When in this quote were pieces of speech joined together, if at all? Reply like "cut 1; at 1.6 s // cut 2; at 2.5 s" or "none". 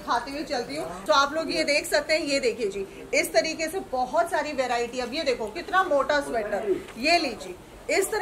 cut 1; at 1.0 s